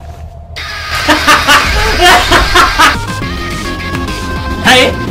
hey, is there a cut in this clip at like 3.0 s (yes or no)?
yes